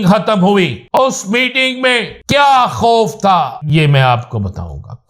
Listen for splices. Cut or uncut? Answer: cut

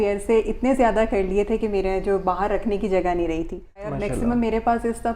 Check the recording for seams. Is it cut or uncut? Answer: cut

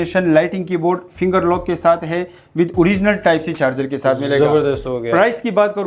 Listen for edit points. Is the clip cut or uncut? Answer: uncut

